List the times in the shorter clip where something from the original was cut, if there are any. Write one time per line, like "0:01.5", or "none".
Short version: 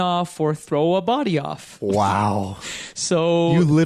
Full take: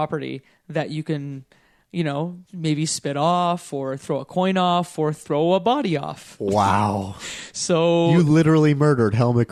none